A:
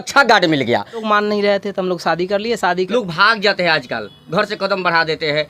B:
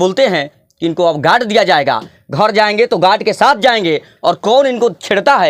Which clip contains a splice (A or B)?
A